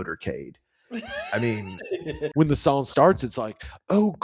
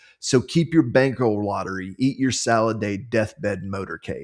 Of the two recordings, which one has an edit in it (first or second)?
first